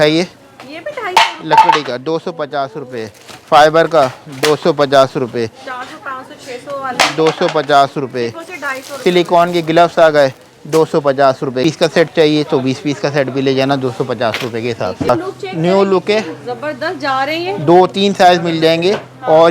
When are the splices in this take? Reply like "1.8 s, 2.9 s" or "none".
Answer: 11.6 s, 15.1 s